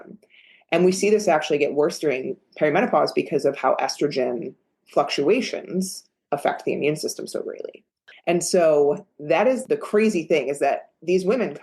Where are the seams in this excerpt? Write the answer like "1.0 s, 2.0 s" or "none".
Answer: 9.6 s